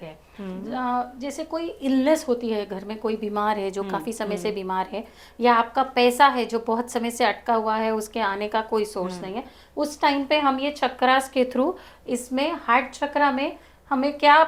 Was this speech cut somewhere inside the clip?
no; 0 cuts

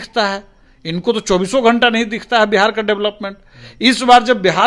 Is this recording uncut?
yes; 0 cuts

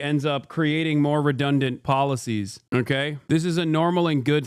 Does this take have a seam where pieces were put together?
yes; 2 cuts; at 1.8 s, 3.2 s

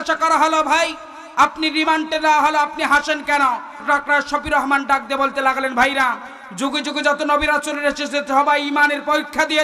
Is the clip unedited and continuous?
no; 1 cut; at 3.8 s

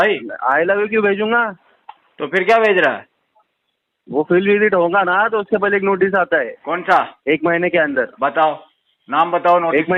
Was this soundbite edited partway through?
no; 0 cuts

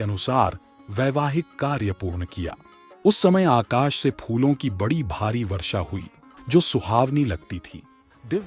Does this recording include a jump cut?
no; 0 cuts

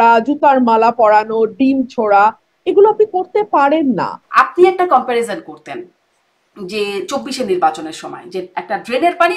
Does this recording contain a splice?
yes; 1 cut; at 4.2 s

